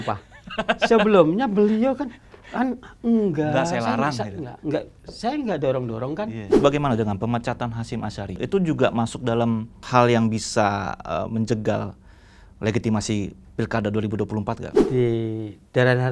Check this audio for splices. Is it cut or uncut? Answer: cut